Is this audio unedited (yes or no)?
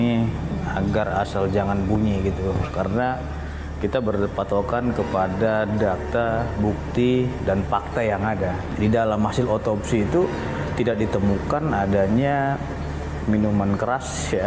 yes